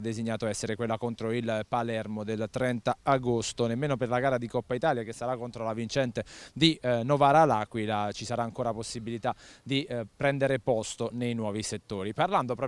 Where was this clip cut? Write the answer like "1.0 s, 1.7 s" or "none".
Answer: 6.3 s